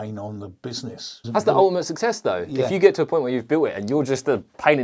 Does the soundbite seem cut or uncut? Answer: cut